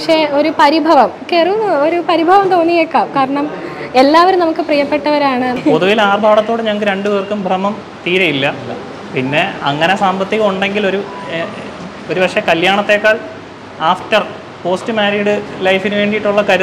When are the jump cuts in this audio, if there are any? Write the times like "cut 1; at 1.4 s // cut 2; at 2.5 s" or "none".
cut 1; at 5.5 s